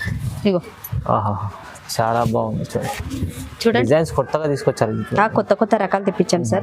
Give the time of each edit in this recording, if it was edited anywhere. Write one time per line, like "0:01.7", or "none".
0:01.8